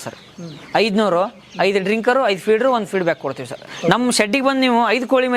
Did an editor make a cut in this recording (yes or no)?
yes